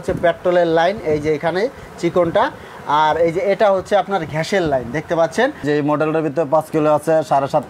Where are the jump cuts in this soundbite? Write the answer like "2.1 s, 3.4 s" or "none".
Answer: 5.6 s